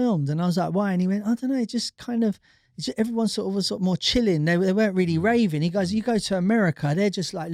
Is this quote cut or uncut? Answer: uncut